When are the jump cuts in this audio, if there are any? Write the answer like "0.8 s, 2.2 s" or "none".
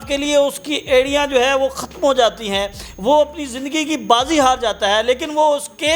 none

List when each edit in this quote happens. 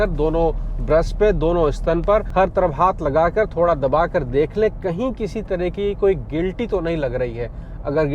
none

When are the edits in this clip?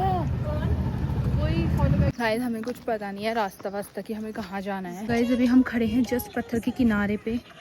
2.1 s, 5.1 s

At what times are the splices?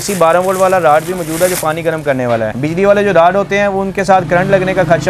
2.5 s

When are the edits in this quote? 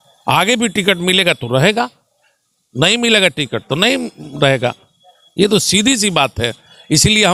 none

